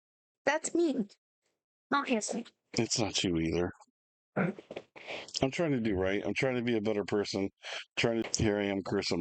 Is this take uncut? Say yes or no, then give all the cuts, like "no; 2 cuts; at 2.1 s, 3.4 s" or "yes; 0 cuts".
no; 1 cut; at 8.3 s